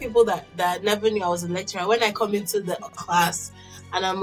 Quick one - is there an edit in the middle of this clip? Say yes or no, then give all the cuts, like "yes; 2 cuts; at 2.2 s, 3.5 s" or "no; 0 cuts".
no; 0 cuts